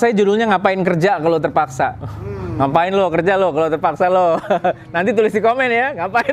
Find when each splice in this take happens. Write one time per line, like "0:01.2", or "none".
none